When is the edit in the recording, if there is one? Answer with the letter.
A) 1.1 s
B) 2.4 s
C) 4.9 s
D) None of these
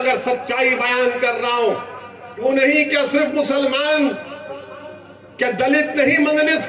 B